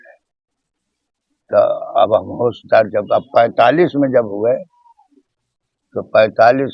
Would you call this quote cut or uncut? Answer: uncut